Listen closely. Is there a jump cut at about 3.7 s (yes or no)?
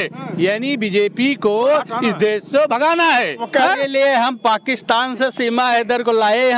yes